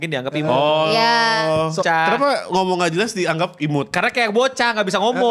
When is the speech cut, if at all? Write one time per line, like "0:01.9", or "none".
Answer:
0:01.8